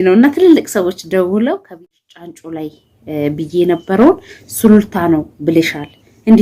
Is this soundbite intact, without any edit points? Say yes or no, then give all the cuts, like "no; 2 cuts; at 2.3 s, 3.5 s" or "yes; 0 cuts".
no; 1 cut; at 1.8 s